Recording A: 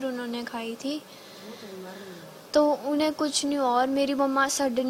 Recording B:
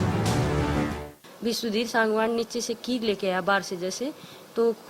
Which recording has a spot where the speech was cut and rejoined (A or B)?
B